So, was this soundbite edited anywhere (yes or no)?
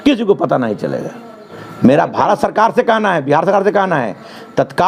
no